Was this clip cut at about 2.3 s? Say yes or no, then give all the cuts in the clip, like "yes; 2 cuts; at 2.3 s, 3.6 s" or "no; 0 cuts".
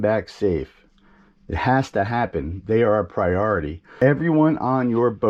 no; 0 cuts